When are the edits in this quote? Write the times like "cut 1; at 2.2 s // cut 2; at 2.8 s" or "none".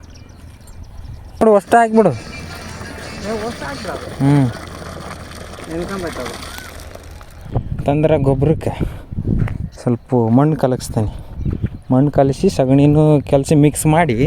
cut 1; at 1.4 s // cut 2; at 7.4 s